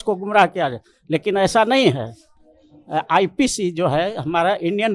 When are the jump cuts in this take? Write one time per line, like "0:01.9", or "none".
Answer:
none